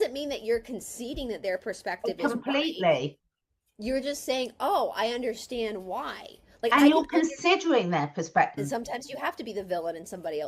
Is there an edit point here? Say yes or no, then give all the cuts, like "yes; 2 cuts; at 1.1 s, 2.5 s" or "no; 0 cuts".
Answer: yes; 1 cut; at 8.6 s